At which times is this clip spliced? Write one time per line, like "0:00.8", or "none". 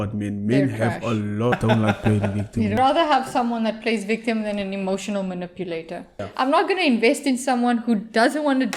0:01.5
0:02.8
0:06.2